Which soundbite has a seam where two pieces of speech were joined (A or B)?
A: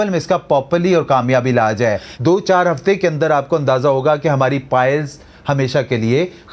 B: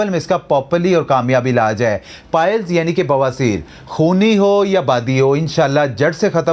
A